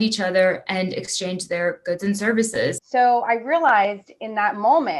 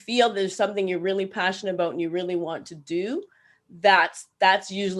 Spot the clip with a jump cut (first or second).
first